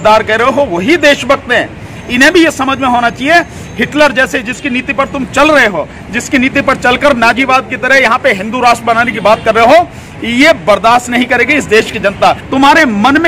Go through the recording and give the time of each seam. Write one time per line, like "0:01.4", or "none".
0:01.9
0:12.4

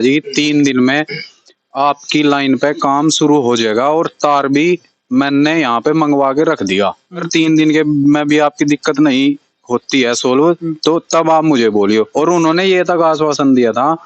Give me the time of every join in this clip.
0:07.3

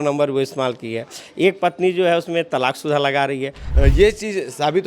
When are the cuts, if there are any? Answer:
0:03.6

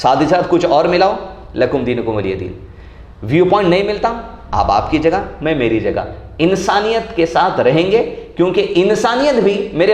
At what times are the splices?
none

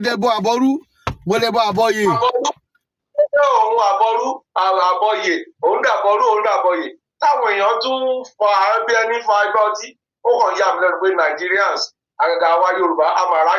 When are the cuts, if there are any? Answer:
none

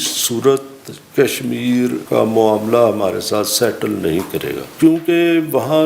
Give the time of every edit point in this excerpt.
0:02.0
0:04.7

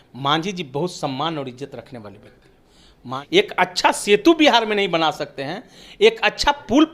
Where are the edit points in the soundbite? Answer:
0:03.1

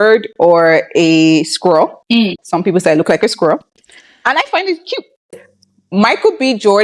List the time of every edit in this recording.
0:05.4

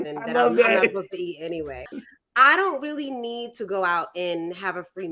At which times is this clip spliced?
0:01.9

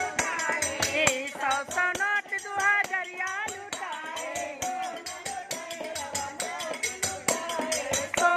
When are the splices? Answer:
none

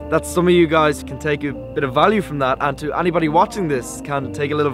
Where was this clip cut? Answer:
0:01.0

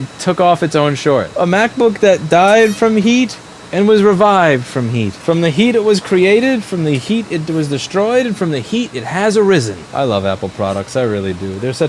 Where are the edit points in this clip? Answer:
0:01.3
0:05.1
0:09.8

